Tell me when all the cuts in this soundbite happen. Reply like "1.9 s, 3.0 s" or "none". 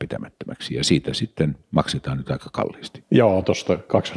none